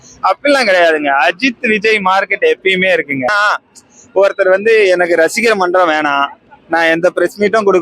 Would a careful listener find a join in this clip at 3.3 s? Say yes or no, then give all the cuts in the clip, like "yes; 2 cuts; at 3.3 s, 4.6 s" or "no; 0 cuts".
yes; 1 cut; at 3.3 s